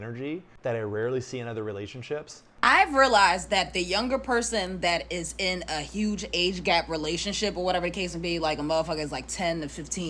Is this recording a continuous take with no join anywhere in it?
no; 1 cut; at 2.6 s

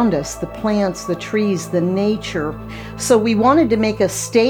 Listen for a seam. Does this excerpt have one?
yes; 1 cut; at 2.8 s

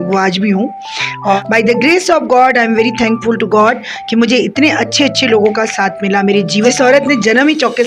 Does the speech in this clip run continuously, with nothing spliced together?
no; 2 cuts; at 1.4 s, 6.7 s

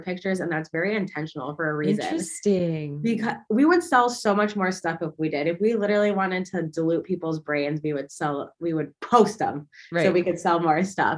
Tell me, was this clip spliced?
no; 0 cuts

